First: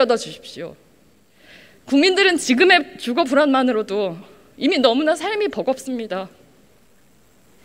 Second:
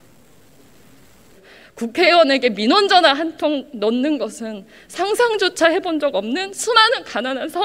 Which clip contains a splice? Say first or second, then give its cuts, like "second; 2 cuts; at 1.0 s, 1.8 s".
second; 1 cut; at 1.3 s